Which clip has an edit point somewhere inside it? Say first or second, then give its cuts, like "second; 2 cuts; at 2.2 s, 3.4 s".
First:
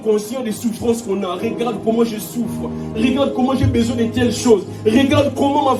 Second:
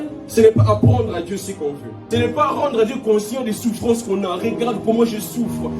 second; 1 cut; at 1.9 s